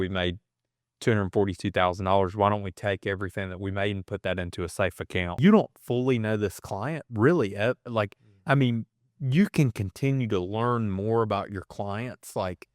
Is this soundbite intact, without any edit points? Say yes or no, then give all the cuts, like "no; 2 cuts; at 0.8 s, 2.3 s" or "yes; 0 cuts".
no; 1 cut; at 5.4 s